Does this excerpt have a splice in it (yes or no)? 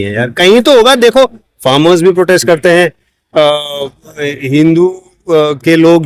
no